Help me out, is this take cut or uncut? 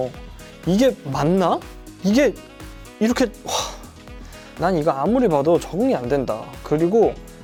uncut